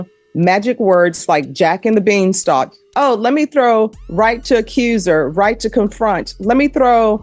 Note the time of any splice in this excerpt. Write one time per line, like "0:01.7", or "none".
none